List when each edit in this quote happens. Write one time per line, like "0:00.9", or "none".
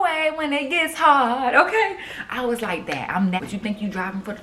0:03.4